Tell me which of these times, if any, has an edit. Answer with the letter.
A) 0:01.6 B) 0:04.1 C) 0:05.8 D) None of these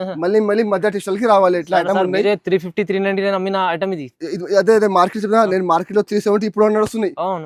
D